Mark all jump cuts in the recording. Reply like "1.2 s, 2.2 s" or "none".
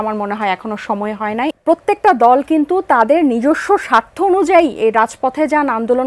1.6 s

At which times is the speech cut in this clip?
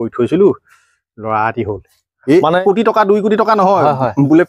2.6 s

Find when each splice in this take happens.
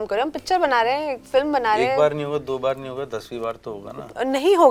none

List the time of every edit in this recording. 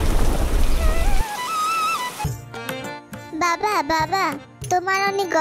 2.2 s

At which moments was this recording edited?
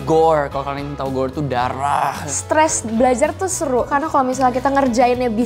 2.3 s, 3.9 s

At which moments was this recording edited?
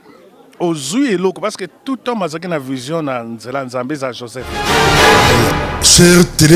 4.6 s

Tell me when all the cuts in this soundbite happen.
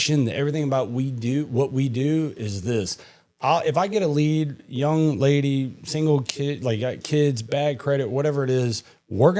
none

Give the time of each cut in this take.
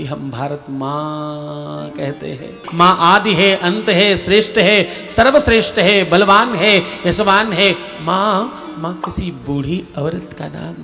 2.6 s

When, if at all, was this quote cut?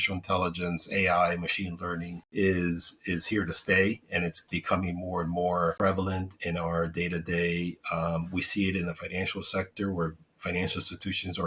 2.1 s, 5.8 s

